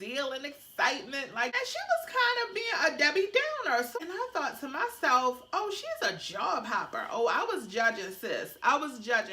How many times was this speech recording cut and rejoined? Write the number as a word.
two